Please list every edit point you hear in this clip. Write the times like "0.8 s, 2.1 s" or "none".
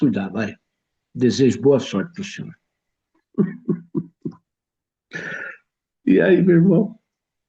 none